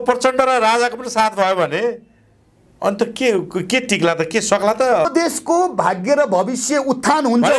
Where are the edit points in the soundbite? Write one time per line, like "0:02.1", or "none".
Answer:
0:05.1

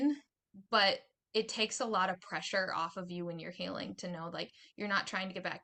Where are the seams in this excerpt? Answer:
none

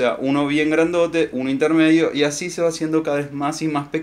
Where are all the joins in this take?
none

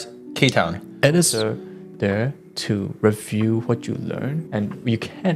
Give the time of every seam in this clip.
0:01.4
0:04.4

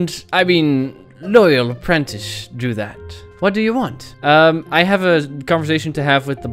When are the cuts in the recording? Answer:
0:03.3

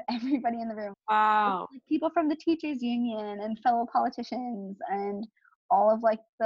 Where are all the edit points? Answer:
0:01.0

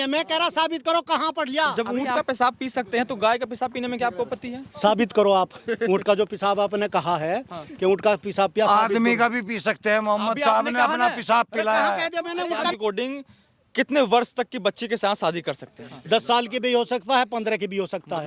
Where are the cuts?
0:01.8
0:12.7
0:15.9

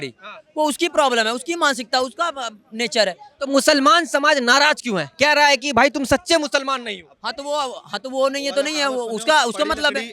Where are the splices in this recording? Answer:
none

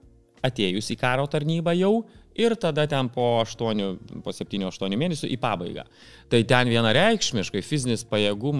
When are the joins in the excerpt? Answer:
none

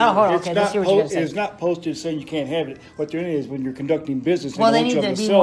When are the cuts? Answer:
none

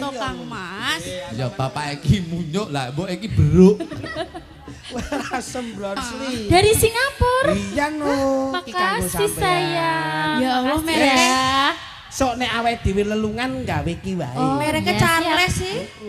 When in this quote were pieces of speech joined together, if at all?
0:06.0

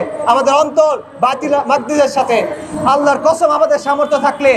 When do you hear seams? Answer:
none

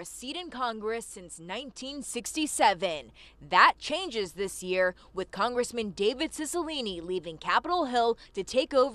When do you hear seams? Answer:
none

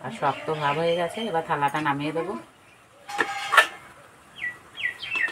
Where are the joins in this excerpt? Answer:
none

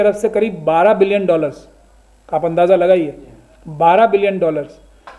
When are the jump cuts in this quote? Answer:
none

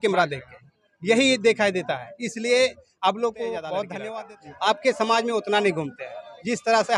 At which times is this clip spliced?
0:04.0

